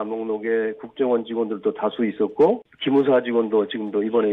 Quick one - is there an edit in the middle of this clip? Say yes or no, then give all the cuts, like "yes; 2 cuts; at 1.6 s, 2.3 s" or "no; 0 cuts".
yes; 1 cut; at 2.7 s